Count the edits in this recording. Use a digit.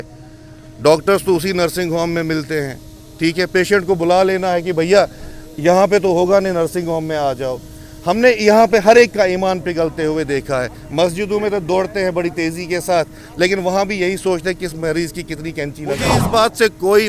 1